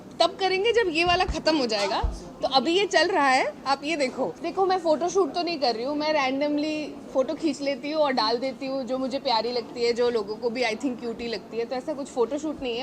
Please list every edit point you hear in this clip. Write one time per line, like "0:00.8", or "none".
0:04.4

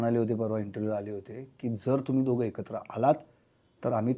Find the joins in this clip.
none

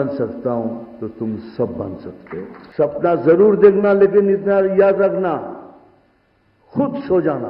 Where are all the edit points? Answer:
0:02.6

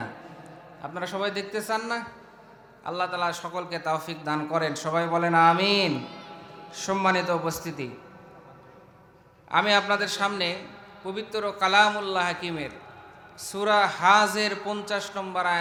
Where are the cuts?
none

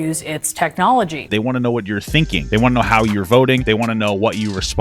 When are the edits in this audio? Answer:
0:01.3
0:02.4
0:03.6

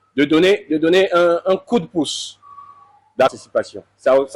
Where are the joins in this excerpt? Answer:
0:03.3

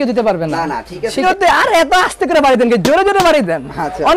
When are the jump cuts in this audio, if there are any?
0:01.2

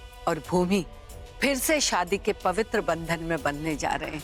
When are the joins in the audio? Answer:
none

